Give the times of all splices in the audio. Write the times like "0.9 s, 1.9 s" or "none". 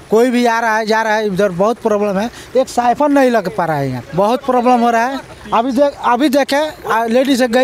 none